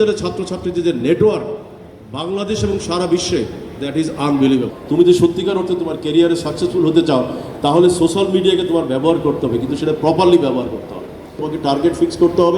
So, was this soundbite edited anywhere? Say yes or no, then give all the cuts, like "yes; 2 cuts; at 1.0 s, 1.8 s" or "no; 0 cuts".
yes; 2 cuts; at 4.8 s, 11.4 s